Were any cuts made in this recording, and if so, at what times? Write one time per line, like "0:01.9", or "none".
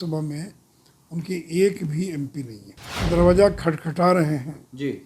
0:03.0